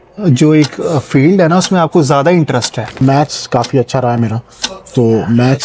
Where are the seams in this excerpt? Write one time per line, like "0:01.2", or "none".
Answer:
0:02.9